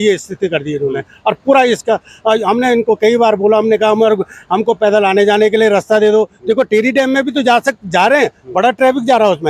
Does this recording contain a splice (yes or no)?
no